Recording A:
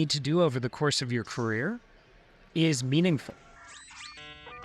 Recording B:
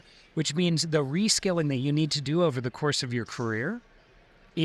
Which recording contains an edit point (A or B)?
A